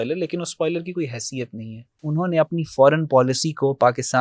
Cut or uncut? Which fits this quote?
cut